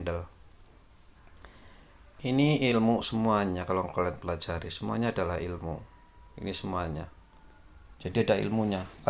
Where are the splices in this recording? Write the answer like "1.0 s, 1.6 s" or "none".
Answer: 7.8 s